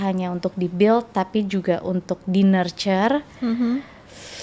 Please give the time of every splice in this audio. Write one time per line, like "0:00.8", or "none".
none